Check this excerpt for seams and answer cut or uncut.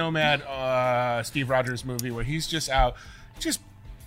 uncut